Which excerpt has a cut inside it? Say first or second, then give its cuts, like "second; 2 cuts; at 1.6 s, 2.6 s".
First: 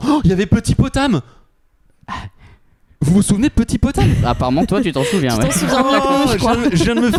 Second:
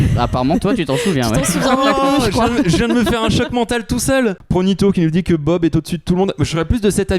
second; 1 cut; at 4.4 s